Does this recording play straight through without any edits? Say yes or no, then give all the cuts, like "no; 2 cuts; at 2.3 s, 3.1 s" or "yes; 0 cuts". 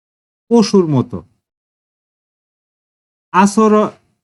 yes; 0 cuts